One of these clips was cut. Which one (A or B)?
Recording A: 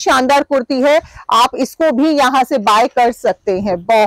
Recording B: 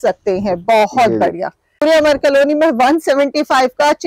B